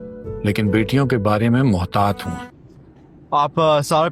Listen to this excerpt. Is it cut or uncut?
cut